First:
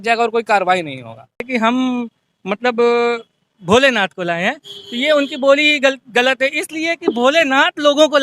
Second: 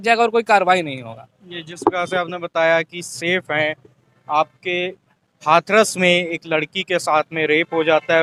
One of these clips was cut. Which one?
first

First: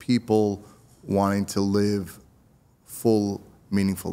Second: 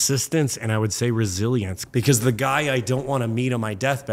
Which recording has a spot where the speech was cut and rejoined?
second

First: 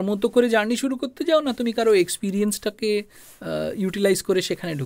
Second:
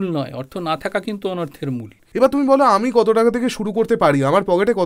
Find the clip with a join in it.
second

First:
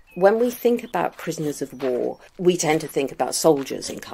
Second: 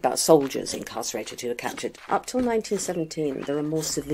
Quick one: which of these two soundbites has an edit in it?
second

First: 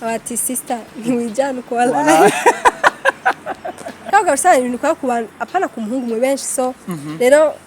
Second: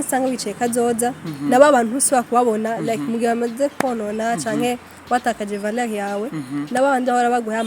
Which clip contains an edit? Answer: first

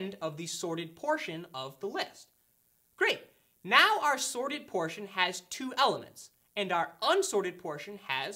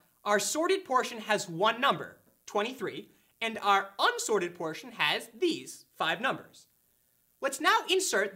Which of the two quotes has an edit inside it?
second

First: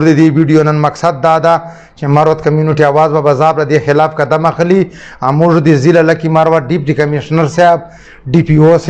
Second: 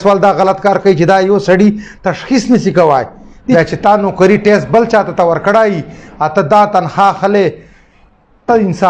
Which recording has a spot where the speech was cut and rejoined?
second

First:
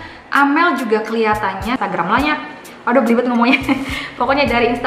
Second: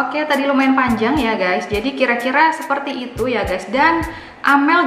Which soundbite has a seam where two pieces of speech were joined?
first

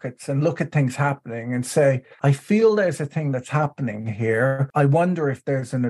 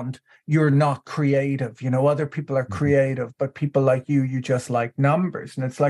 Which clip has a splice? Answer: first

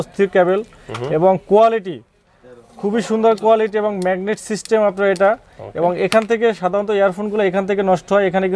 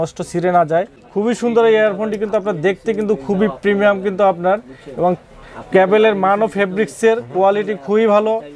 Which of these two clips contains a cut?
second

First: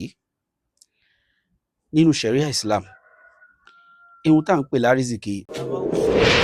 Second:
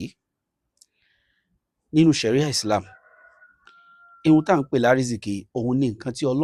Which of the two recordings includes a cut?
first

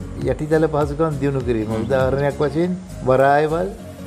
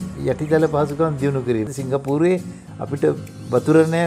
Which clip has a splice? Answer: second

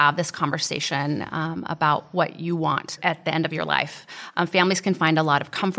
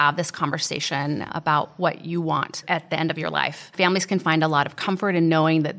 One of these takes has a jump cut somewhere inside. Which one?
second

